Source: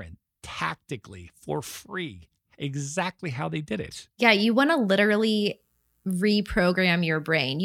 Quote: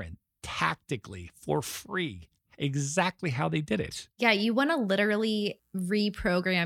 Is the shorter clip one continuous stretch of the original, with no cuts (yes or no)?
no